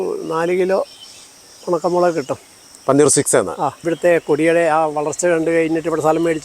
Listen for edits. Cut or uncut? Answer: cut